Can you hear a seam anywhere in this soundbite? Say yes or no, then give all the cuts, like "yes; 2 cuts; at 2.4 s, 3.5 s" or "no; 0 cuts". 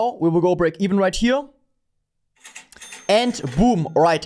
no; 0 cuts